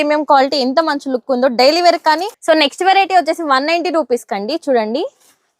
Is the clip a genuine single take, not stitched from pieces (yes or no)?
no